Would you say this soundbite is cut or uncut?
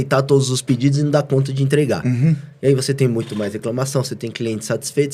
uncut